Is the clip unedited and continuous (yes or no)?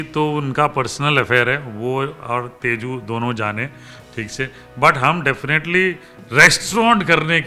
yes